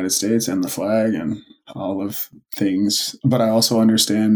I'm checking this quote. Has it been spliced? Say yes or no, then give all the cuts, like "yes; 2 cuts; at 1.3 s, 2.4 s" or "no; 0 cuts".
yes; 2 cuts; at 1.5 s, 3.1 s